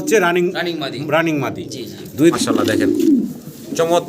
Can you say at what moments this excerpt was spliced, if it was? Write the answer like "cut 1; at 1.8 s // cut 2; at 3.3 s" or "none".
cut 1; at 2.3 s